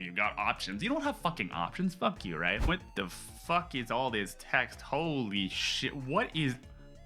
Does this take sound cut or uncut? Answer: cut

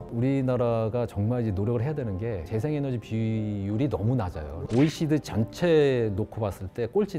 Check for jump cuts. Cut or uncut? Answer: uncut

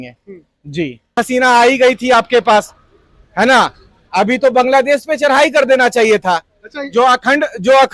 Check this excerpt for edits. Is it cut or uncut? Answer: cut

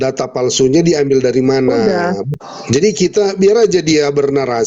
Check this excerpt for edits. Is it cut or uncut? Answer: cut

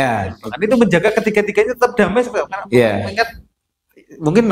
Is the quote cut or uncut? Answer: uncut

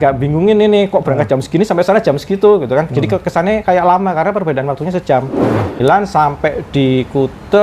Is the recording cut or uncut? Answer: cut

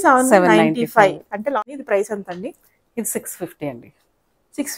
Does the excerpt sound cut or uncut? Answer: cut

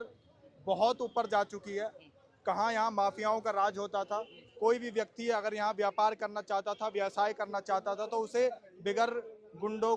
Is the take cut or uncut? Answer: uncut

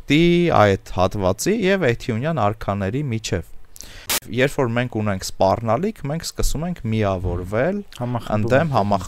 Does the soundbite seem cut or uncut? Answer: cut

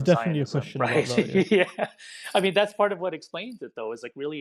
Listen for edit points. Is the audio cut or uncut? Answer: uncut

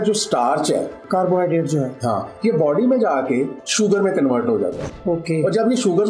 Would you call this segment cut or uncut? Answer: cut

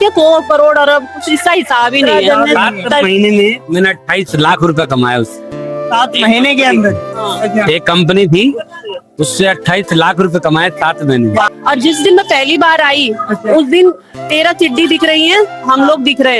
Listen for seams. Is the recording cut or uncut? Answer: cut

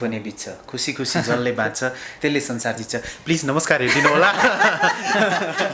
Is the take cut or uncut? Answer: uncut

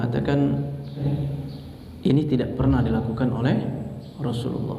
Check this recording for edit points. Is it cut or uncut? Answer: cut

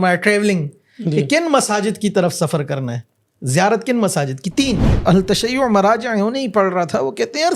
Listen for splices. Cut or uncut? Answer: cut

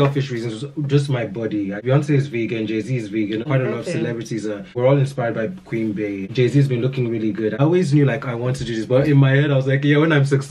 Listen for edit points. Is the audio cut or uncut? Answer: cut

